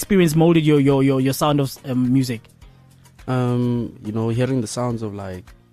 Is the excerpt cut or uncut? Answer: uncut